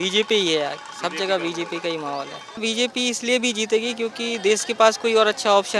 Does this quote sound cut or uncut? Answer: cut